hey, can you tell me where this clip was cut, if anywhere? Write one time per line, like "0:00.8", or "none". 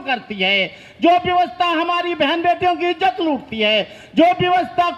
none